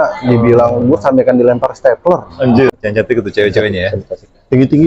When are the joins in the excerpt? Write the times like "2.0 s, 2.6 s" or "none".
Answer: 2.7 s